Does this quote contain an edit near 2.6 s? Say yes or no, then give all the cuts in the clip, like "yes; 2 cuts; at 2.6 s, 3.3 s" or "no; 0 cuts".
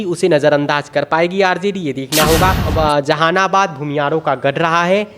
yes; 1 cut; at 2.6 s